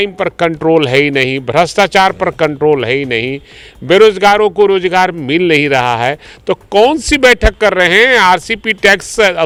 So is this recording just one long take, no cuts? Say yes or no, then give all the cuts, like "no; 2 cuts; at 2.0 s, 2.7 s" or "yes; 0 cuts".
yes; 0 cuts